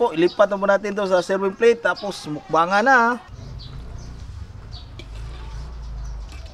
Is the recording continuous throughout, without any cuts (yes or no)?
no